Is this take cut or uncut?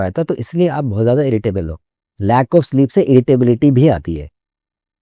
uncut